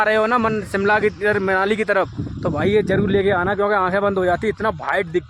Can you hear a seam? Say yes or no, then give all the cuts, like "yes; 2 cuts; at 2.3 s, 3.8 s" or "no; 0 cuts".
no; 0 cuts